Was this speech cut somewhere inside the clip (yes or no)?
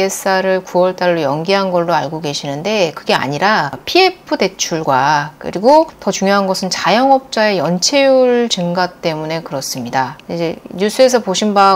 no